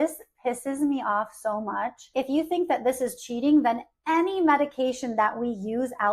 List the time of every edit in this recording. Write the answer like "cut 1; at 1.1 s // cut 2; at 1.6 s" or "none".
cut 1; at 2.0 s